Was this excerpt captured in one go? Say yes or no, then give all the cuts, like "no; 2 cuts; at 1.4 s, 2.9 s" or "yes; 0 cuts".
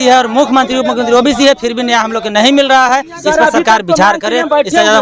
yes; 0 cuts